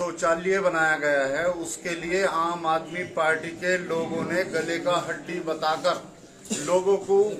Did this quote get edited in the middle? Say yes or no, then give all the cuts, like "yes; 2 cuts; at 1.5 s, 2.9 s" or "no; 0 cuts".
no; 0 cuts